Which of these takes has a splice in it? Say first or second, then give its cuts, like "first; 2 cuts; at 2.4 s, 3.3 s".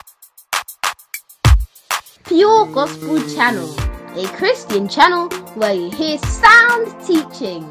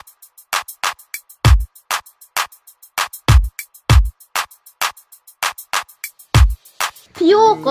first; 1 cut; at 2.1 s